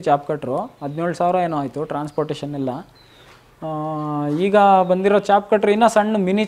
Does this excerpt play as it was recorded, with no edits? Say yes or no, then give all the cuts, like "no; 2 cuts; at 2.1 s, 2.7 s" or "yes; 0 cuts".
yes; 0 cuts